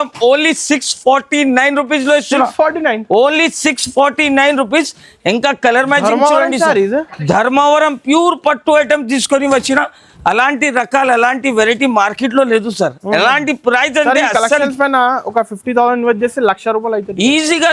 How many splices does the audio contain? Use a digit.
0